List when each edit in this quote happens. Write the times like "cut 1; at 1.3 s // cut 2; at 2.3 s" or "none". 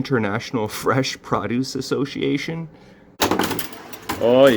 cut 1; at 3.2 s